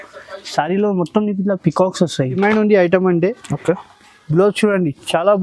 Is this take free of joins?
no; 1 cut; at 2.4 s

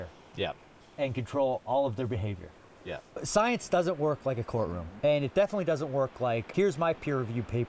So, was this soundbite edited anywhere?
yes; 3 cuts; at 3.1 s, 4.8 s, 6.5 s

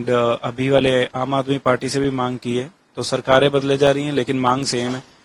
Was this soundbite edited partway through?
no; 0 cuts

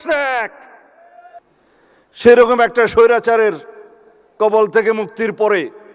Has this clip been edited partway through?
yes; 1 cut; at 1.4 s

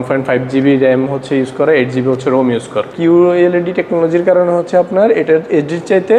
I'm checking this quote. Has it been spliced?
yes; 1 cut; at 2.9 s

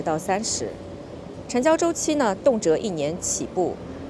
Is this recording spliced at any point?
no; 0 cuts

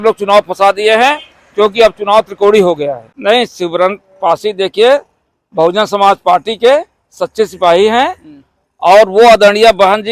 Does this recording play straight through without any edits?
no; 1 cut; at 3.1 s

